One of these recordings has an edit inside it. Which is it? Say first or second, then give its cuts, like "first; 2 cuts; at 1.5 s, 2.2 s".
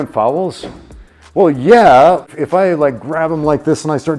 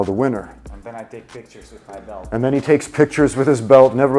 first; 1 cut; at 2.3 s